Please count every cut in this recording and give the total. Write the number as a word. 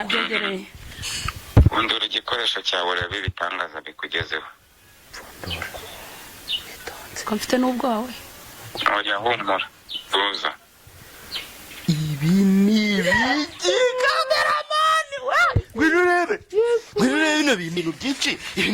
one